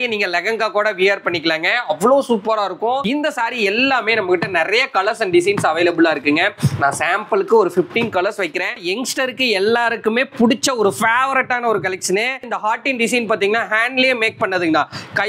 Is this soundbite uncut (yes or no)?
no